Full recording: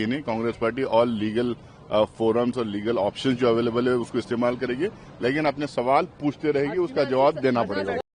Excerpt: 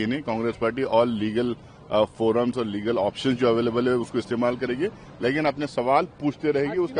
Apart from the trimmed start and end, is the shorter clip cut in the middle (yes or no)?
no